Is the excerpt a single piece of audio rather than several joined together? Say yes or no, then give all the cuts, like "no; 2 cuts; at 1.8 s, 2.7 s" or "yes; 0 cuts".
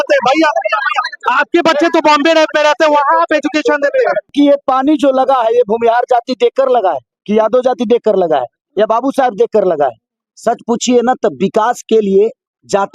no; 1 cut; at 4.3 s